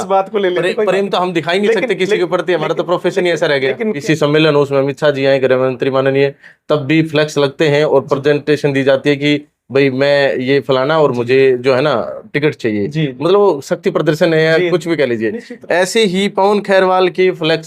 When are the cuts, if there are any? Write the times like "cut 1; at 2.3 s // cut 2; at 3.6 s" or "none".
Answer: cut 1; at 4.0 s

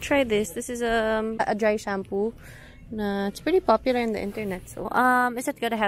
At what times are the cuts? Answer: cut 1; at 1.4 s // cut 2; at 4.9 s

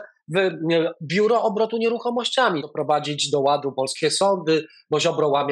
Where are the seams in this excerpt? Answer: cut 1; at 2.7 s

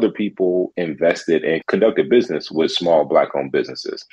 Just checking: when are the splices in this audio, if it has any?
cut 1; at 1.6 s

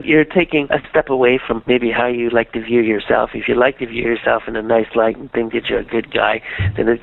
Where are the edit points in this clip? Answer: none

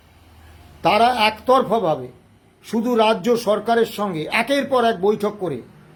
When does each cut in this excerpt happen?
none

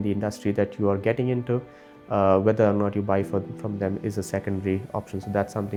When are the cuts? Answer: none

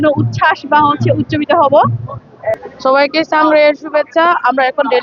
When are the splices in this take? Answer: cut 1; at 2.6 s

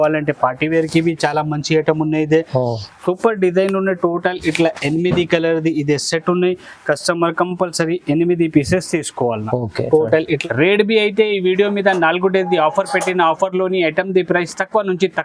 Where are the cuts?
cut 1; at 10.4 s

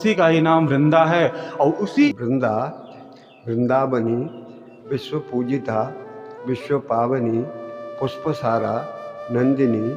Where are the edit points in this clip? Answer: cut 1; at 2.1 s

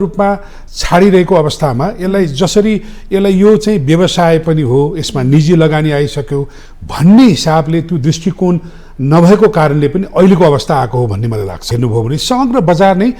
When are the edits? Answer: cut 1; at 11.7 s

